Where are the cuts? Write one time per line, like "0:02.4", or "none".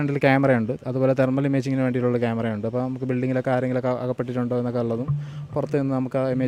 none